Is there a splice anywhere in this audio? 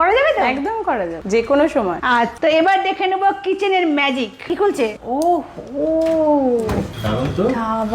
yes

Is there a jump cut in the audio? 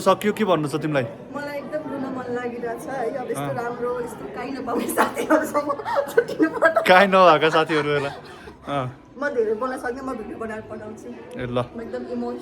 no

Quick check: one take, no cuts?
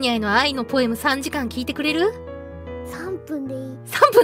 yes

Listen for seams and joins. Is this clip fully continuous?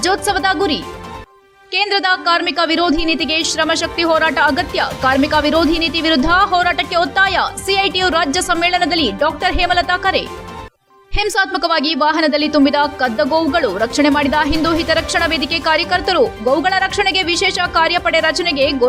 yes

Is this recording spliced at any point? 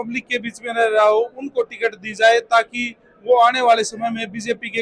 no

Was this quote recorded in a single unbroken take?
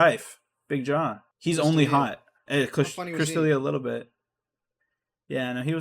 no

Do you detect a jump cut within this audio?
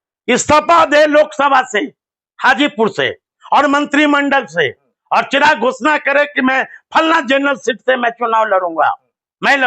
no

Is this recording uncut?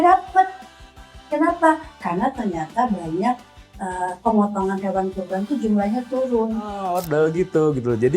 no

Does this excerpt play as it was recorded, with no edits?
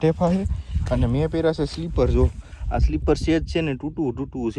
yes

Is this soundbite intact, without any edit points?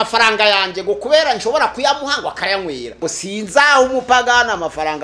no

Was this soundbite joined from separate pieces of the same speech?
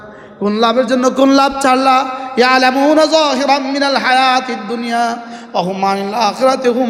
no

